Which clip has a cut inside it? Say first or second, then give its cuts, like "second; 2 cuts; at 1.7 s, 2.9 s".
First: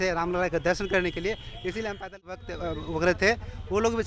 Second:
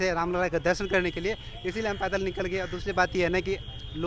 first; 1 cut; at 2.4 s